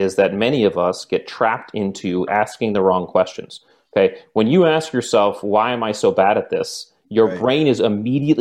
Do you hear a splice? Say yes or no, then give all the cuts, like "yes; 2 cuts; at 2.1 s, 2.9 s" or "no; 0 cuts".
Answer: no; 0 cuts